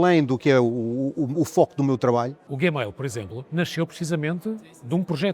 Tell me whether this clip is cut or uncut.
cut